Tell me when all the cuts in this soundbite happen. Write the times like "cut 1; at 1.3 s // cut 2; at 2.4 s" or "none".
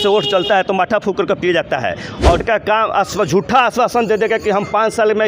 cut 1; at 2.4 s